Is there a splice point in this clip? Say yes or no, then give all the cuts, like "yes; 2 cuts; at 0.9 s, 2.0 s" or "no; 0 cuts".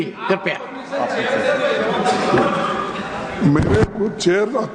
no; 0 cuts